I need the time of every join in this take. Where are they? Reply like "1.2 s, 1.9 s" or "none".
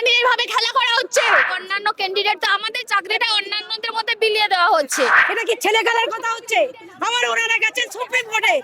1.5 s, 5.3 s